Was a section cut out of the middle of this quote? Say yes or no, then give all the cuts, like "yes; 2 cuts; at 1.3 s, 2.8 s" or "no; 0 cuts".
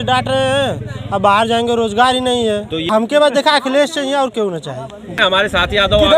yes; 2 cuts; at 3.1 s, 5.1 s